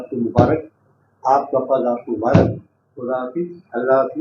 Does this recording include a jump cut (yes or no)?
no